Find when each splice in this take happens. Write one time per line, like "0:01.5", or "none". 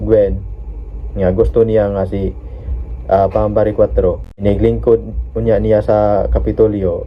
0:04.4